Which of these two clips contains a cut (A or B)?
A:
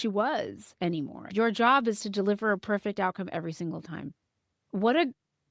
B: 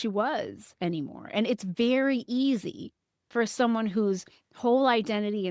A